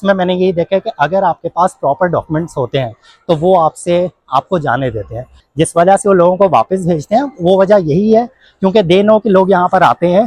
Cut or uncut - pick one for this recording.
cut